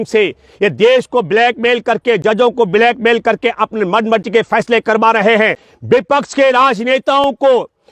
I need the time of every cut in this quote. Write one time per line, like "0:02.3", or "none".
0:05.7

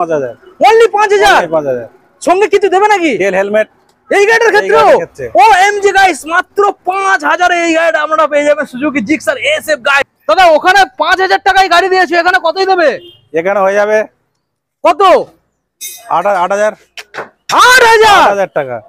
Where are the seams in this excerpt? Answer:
0:10.0

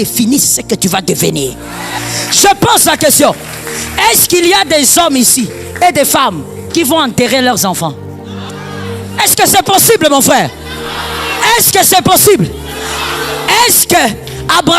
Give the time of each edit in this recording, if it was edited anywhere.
0:02.0
0:08.5

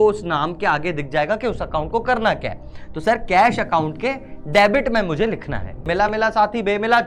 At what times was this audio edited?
0:05.9

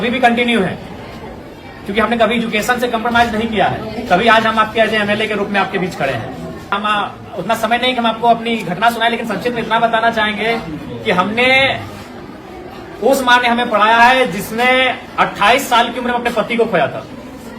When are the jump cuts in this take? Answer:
0:06.7

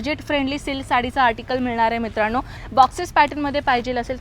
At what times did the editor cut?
0:02.6

